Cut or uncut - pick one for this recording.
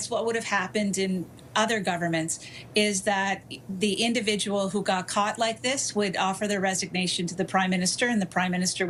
uncut